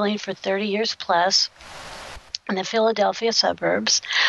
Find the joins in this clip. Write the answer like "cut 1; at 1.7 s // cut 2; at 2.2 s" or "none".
none

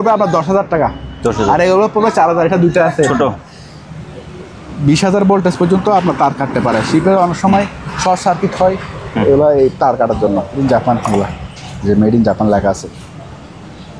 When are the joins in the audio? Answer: cut 1; at 3.5 s // cut 2; at 10.6 s

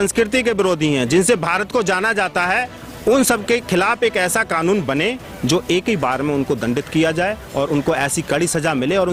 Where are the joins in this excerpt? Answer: none

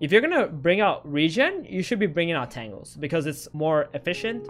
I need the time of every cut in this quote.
cut 1; at 3.5 s

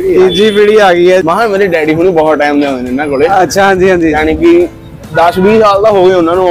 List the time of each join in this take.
cut 1; at 1.2 s

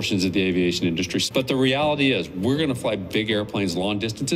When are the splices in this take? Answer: cut 1; at 1.3 s

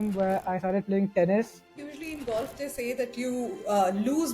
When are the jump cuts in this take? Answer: cut 1; at 1.7 s

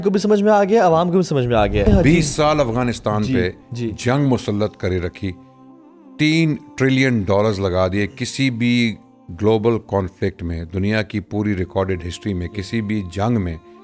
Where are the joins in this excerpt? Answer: cut 1; at 1.9 s

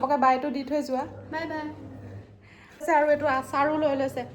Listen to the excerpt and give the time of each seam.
cut 1; at 2.8 s

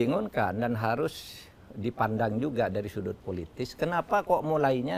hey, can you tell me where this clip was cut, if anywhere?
none

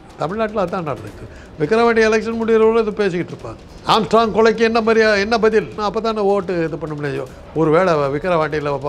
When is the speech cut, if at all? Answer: cut 1; at 3.7 s // cut 2; at 5.8 s

